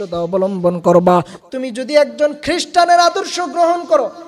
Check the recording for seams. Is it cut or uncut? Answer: cut